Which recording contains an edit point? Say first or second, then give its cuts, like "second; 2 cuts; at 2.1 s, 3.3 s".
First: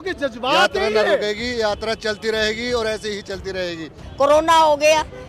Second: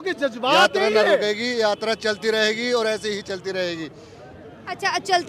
first; 1 cut; at 4.0 s